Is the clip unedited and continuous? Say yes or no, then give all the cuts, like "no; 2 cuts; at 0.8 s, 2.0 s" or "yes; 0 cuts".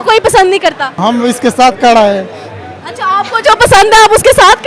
no; 1 cut; at 1.0 s